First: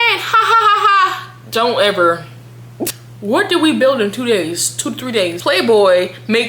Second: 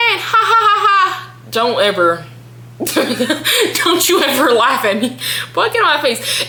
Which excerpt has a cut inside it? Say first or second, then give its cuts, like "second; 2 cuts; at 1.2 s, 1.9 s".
first; 2 cuts; at 2.9 s, 5.4 s